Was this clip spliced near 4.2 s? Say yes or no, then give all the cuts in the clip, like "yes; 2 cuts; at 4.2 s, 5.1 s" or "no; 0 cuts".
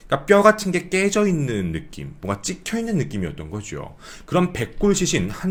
no; 0 cuts